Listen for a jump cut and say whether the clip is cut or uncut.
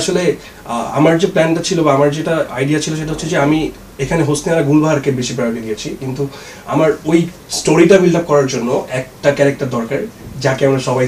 uncut